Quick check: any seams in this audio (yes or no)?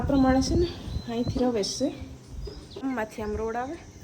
yes